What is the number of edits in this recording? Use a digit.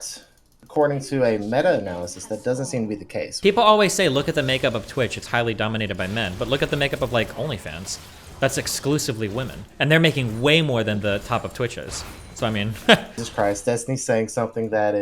2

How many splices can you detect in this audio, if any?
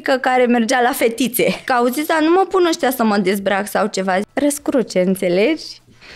2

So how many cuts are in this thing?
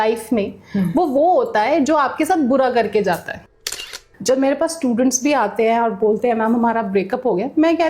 1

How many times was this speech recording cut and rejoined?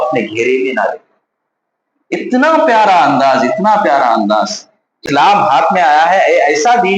1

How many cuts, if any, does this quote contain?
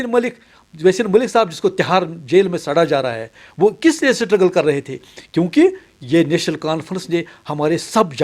0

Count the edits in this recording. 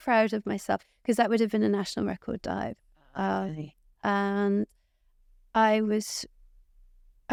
0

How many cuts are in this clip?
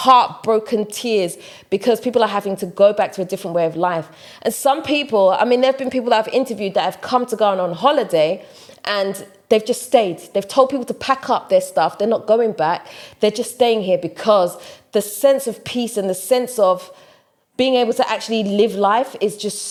0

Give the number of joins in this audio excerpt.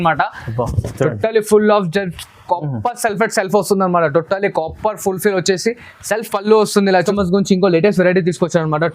1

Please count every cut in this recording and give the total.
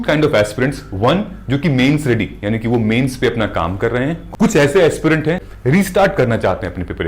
2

